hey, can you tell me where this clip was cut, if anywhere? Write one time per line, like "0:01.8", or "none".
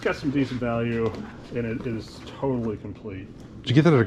none